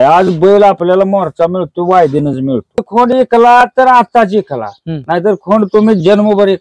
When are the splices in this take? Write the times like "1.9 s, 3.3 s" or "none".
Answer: 2.8 s